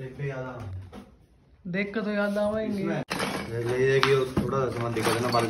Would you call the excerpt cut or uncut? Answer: cut